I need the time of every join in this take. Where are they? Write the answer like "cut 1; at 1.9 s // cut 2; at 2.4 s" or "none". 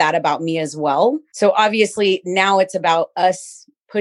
cut 1; at 1.3 s